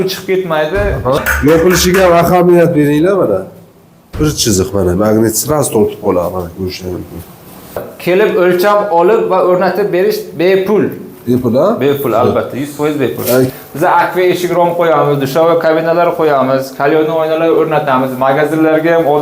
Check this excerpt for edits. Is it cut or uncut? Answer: cut